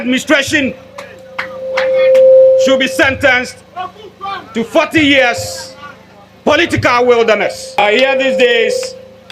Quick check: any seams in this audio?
yes; 1 cut; at 7.8 s

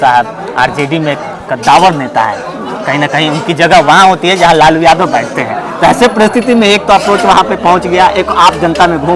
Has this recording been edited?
no; 0 cuts

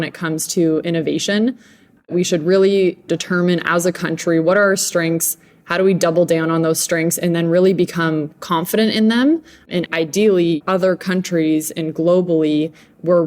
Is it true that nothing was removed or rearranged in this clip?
no; 4 cuts; at 2.1 s, 3.0 s, 9.9 s, 10.6 s

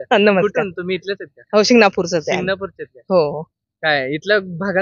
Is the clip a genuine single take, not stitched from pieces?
yes; 0 cuts

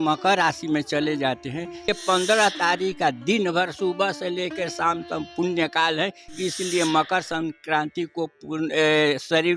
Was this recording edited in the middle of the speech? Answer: yes; 1 cut; at 1.9 s

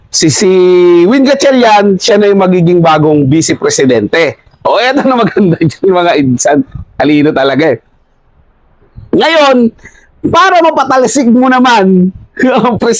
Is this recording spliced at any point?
no; 0 cuts

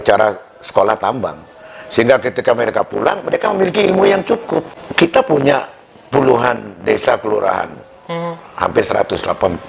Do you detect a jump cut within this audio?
yes; 1 cut; at 4.8 s

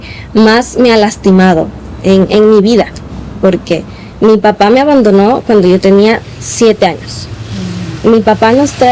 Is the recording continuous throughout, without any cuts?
yes; 0 cuts

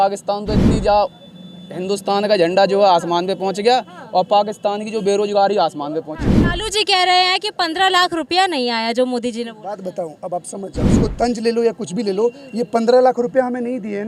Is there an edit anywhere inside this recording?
no; 0 cuts

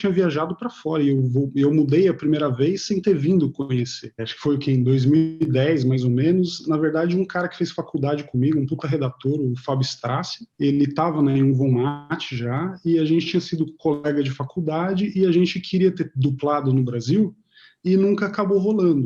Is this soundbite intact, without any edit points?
yes; 0 cuts

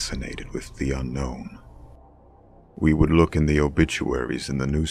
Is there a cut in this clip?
no; 0 cuts

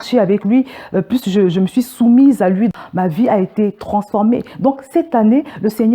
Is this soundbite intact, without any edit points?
no; 1 cut; at 2.7 s

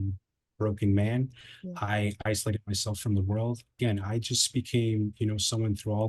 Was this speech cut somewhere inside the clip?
yes; 1 cut; at 3.8 s

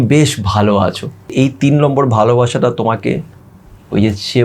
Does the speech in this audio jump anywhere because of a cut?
yes; 1 cut; at 1.3 s

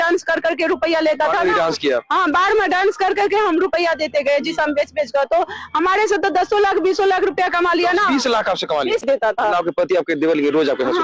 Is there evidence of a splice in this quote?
yes; 1 cut; at 9.0 s

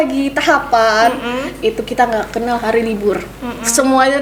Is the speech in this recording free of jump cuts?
yes; 0 cuts

